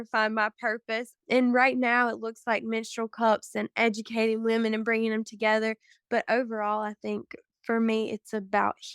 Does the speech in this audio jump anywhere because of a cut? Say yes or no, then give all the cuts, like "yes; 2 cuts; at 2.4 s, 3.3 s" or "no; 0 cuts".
yes; 1 cut; at 1.1 s